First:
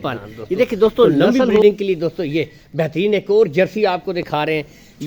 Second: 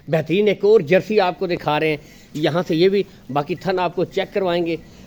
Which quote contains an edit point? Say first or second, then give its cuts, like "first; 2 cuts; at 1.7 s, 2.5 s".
first; 1 cut; at 1.6 s